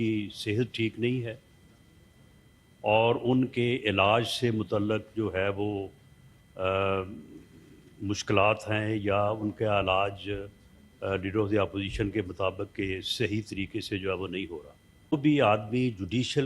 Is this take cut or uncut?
cut